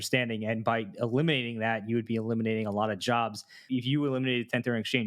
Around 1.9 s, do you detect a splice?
no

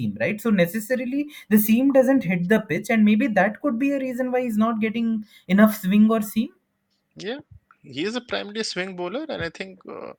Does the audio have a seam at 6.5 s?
no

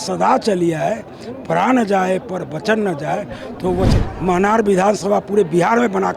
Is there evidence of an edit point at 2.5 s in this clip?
no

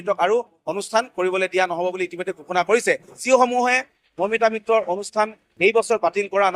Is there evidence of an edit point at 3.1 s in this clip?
yes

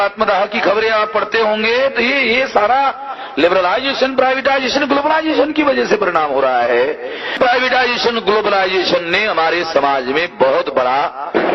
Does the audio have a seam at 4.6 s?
no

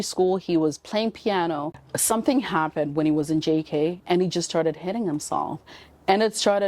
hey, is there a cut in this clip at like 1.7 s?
yes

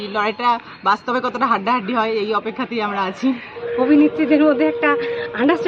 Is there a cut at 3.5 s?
yes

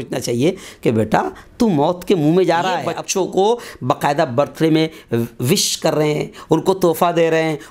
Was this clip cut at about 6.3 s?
no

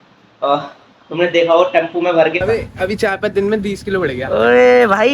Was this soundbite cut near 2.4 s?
yes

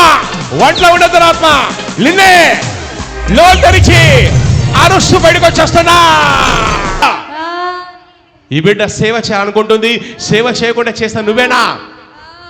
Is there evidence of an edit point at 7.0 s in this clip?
yes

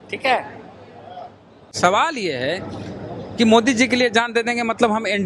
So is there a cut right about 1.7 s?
yes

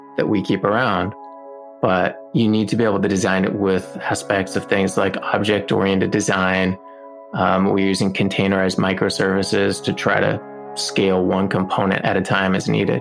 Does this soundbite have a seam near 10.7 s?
yes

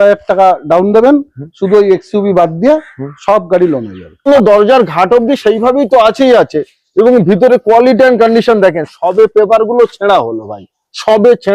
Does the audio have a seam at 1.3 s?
no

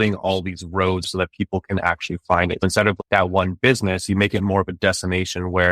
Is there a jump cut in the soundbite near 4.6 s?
no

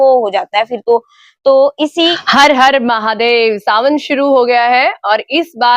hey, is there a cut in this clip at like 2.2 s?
yes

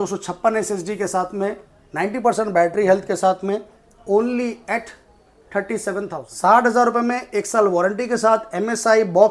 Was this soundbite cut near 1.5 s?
no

